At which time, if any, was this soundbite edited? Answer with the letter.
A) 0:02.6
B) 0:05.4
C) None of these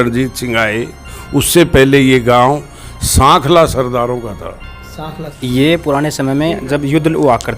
B